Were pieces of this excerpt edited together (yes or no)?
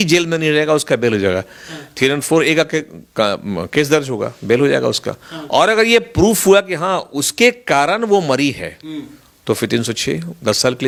no